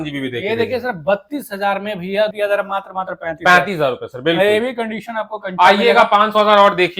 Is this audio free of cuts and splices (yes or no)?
no